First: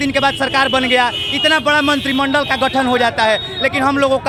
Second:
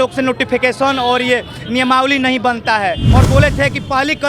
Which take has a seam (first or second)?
second